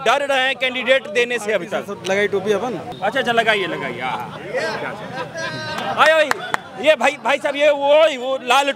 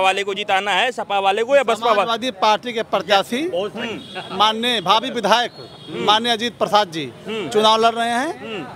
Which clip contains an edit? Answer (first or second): first